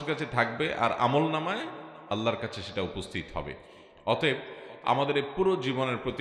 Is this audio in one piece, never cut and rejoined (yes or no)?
yes